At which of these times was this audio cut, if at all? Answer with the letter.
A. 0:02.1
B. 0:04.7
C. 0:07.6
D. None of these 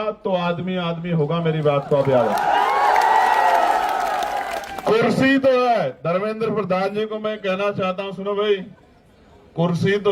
B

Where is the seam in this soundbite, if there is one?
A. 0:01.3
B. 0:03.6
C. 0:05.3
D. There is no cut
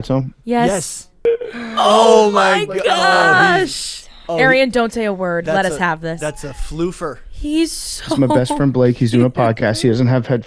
A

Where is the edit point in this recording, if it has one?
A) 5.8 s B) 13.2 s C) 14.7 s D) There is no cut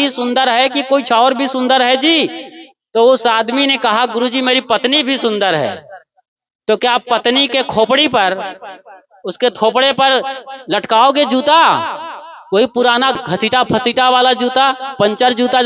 B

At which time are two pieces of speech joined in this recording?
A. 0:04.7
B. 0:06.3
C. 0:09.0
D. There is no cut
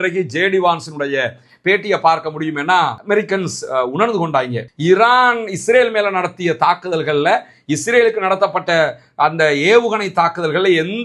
A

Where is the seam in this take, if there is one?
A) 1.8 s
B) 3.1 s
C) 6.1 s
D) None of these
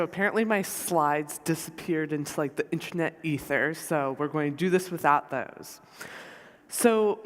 D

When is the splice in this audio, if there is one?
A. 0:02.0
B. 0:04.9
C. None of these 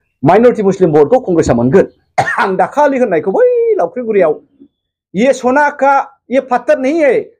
A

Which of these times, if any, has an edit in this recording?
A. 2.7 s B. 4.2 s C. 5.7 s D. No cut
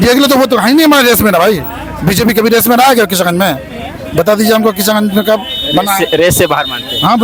D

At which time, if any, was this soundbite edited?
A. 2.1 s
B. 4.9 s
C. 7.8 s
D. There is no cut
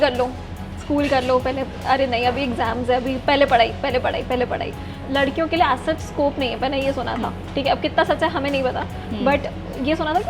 B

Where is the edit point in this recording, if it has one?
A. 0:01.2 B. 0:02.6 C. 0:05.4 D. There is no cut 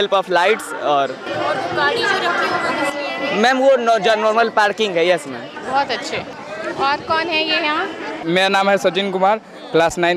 D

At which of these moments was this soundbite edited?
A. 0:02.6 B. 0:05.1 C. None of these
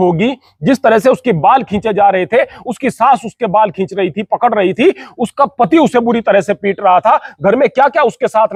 C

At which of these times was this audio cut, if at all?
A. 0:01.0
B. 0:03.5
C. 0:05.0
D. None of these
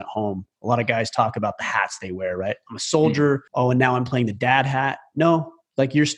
B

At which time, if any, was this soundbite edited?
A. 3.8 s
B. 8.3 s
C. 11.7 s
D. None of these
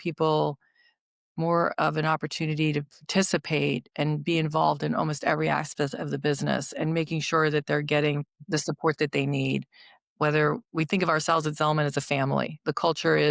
B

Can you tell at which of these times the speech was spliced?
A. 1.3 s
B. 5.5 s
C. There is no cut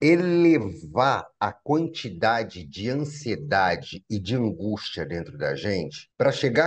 C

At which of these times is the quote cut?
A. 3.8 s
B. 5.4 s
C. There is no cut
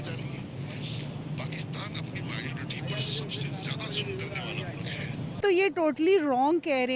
B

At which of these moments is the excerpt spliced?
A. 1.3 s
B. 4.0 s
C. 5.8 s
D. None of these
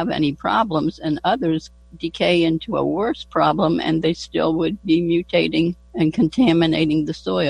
C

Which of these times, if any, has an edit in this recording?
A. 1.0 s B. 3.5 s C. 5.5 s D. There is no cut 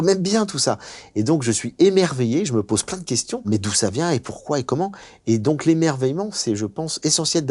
B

